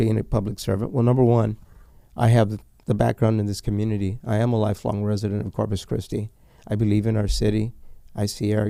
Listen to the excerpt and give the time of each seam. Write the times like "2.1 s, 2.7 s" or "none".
none